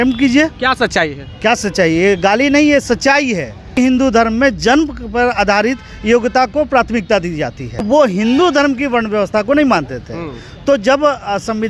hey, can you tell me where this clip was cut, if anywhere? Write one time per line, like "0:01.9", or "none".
0:03.8
0:07.8